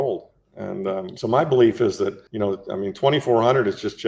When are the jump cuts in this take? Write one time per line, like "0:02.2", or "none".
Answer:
0:01.1
0:02.2